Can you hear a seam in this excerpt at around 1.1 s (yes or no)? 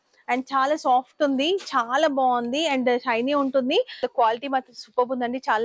no